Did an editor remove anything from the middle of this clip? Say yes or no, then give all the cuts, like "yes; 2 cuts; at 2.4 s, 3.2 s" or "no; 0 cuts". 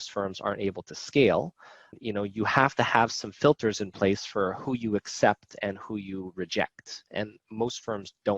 yes; 1 cut; at 1.9 s